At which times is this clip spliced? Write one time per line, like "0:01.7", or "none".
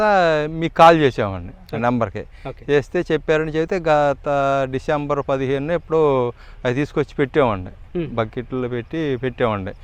none